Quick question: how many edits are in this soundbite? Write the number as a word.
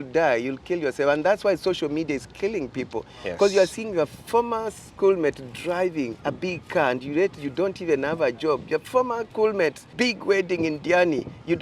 three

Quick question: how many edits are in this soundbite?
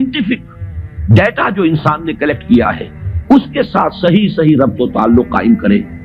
zero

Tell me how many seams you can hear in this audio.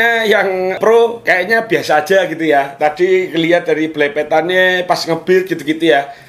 zero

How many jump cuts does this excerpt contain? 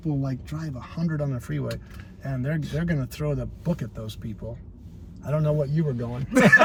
zero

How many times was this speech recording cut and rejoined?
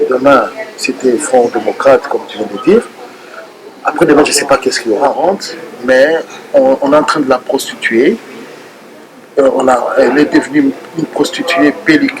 one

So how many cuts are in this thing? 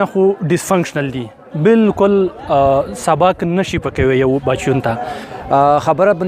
one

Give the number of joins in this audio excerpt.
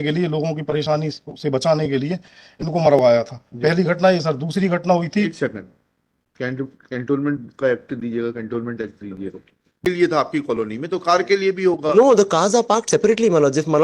one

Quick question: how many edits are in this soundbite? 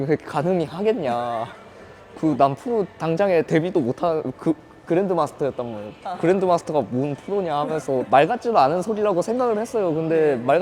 one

